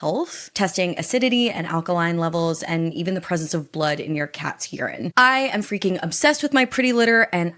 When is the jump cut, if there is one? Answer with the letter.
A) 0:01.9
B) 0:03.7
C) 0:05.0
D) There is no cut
C